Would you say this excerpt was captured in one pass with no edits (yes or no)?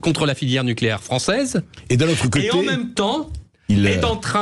yes